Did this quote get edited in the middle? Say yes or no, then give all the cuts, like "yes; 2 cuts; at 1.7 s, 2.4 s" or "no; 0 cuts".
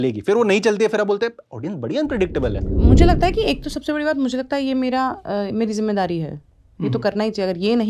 yes; 1 cut; at 2.7 s